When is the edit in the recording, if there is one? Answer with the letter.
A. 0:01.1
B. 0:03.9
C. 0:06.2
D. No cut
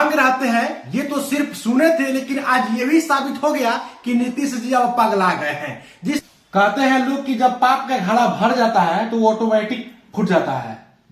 C